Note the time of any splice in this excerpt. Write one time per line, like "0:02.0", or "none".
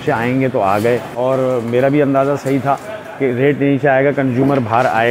0:01.1